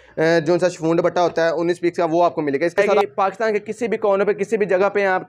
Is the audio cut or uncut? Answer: cut